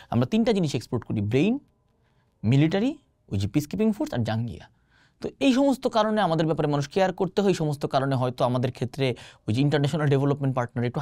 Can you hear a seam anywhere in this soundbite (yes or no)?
no